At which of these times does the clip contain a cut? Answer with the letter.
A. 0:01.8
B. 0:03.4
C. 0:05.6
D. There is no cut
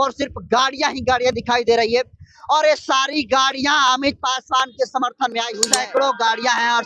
C